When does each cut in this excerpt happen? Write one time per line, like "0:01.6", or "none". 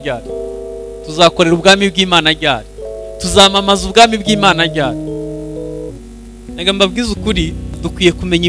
0:05.9